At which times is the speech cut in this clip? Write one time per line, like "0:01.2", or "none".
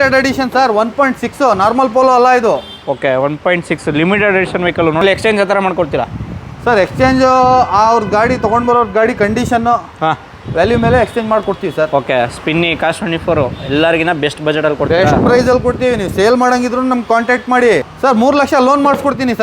0:05.0
0:17.9